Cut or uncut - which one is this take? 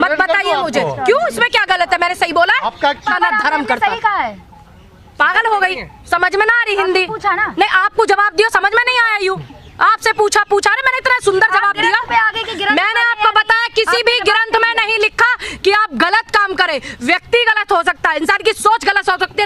cut